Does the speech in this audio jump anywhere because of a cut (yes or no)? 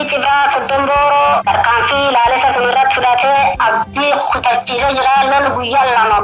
yes